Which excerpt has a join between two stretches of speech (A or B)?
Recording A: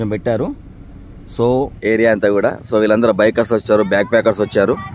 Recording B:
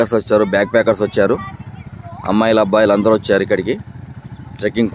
A